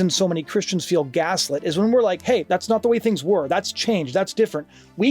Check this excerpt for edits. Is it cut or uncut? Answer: cut